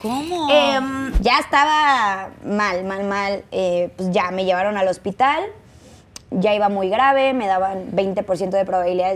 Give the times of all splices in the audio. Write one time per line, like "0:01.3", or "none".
0:01.1